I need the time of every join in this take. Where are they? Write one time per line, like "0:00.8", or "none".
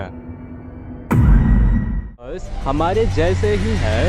0:02.5